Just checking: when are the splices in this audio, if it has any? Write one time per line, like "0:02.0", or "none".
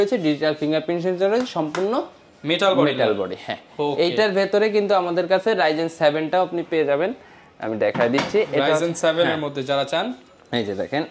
none